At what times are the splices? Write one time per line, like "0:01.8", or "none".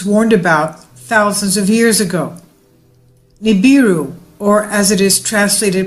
0:03.7